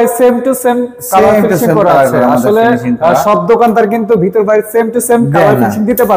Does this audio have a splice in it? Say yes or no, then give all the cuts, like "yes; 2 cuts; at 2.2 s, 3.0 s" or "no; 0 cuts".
no; 0 cuts